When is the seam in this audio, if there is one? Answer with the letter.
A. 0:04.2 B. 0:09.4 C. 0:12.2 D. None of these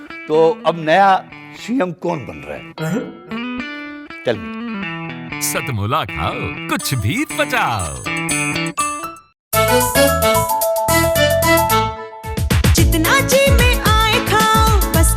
B